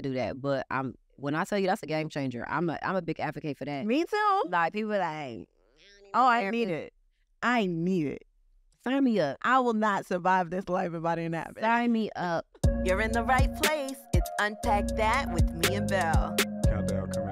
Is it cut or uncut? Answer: cut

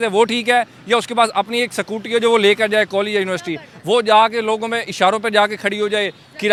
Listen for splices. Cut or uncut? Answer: uncut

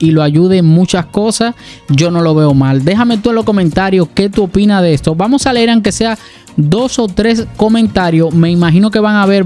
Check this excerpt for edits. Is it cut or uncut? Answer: uncut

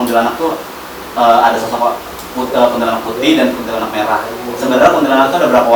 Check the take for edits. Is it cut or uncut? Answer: uncut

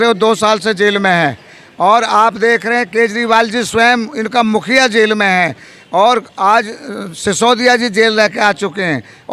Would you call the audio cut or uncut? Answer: uncut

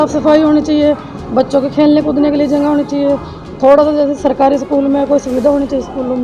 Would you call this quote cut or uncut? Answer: uncut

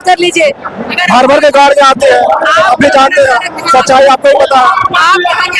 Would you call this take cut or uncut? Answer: uncut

